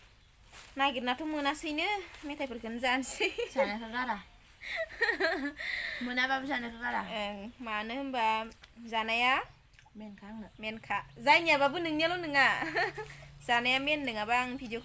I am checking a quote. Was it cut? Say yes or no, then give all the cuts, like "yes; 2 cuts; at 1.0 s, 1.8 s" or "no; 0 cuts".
no; 0 cuts